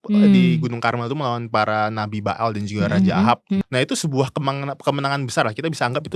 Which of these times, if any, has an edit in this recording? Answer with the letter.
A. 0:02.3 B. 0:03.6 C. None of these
B